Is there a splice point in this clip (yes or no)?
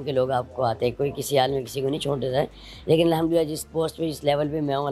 no